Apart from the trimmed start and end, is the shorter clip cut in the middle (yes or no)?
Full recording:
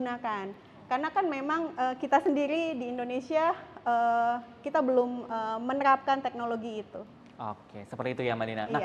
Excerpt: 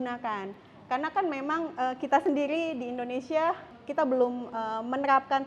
yes